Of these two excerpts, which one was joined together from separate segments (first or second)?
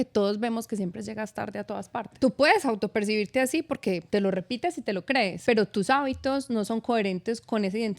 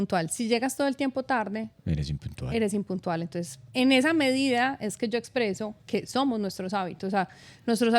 first